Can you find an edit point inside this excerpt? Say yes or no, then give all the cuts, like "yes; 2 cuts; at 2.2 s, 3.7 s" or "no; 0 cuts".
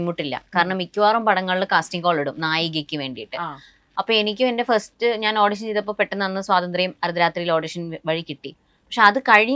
no; 0 cuts